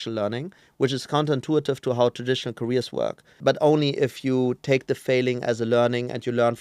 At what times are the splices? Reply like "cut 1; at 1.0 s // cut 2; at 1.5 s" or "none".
cut 1; at 3.3 s